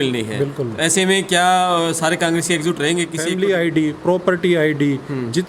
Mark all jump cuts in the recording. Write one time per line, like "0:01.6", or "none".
0:03.4